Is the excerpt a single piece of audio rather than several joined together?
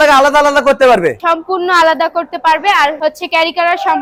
yes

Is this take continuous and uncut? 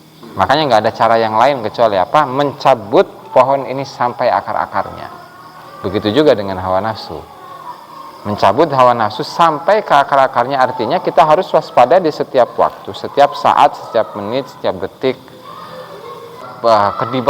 no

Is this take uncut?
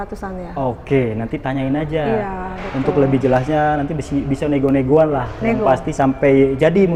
yes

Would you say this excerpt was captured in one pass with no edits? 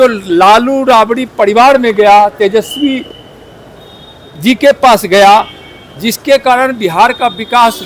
yes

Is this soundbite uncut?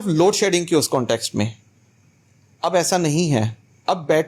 yes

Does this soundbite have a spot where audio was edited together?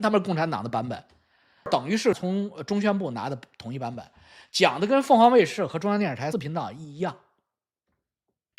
yes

